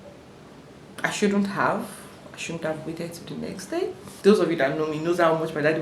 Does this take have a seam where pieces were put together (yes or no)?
yes